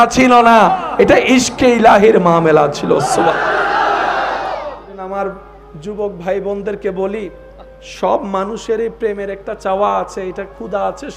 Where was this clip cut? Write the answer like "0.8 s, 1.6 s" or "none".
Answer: 4.9 s